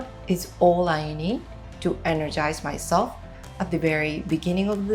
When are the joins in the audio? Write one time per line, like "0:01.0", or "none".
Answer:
none